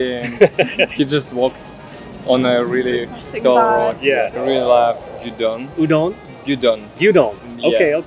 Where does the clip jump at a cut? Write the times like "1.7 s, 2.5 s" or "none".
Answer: 4.4 s